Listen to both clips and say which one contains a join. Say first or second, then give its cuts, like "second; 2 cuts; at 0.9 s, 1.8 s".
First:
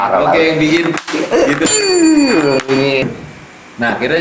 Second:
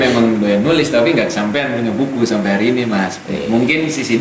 first; 1 cut; at 3.0 s